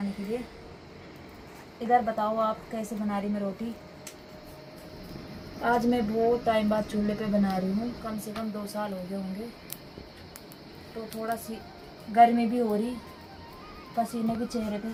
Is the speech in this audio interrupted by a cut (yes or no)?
no